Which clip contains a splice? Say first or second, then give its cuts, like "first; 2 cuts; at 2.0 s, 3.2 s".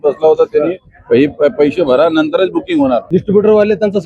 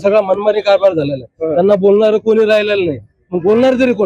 first; 1 cut; at 3.0 s